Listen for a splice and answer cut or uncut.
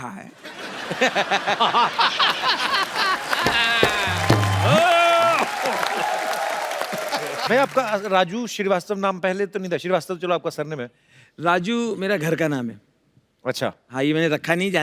cut